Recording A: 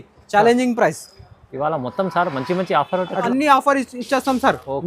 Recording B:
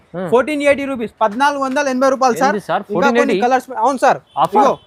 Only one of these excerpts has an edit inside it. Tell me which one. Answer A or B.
A